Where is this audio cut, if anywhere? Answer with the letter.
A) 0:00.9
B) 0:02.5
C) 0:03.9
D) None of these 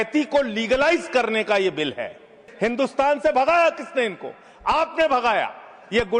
B